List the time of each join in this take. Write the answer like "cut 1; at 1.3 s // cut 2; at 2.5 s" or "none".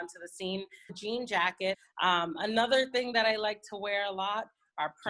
cut 1; at 1.0 s // cut 2; at 1.9 s